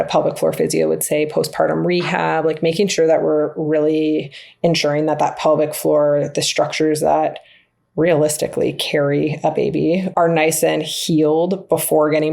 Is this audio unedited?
no; 1 cut; at 10.1 s

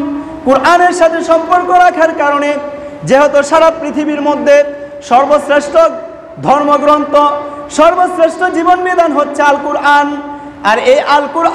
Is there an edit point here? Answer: no; 0 cuts

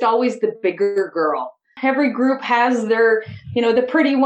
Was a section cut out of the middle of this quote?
no; 0 cuts

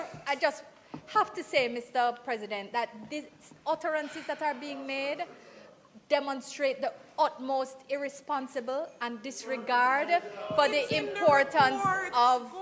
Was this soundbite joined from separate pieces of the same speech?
no; 0 cuts

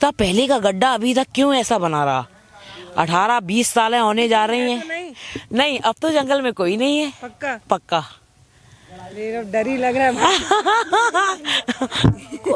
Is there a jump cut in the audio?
no; 0 cuts

